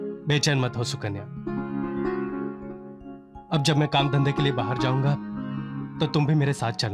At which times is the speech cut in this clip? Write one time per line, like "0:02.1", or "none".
none